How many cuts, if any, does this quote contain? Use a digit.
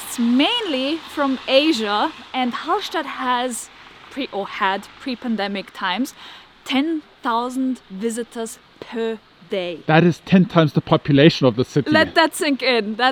0